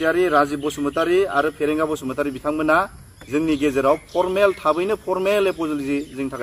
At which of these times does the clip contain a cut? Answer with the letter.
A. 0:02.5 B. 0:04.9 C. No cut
C